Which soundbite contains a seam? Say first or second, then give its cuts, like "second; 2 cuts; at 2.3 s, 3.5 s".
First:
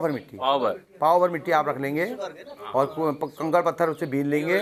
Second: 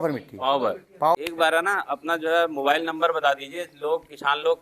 second; 1 cut; at 1.1 s